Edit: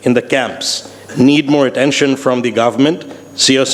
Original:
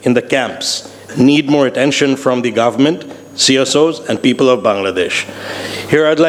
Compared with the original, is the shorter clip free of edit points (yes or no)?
yes